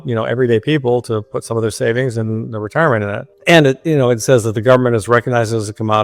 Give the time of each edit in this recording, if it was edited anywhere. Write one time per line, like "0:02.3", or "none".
0:03.3